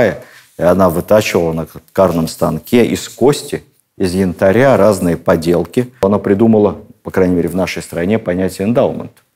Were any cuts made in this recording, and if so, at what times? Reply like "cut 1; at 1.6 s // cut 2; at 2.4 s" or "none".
cut 1; at 6.0 s